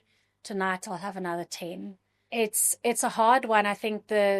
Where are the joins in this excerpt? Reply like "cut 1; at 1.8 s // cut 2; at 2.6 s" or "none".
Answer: cut 1; at 2.2 s